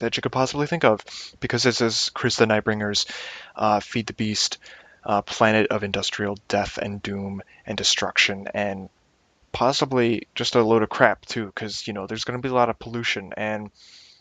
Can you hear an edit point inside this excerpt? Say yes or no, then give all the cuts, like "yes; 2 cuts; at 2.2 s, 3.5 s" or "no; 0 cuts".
yes; 1 cut; at 6.1 s